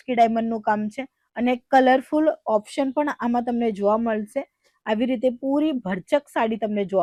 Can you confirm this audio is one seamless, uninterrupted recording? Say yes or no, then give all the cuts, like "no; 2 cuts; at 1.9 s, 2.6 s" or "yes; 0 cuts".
yes; 0 cuts